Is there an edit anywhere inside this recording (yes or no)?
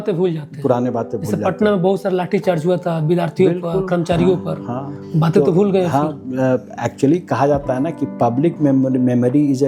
no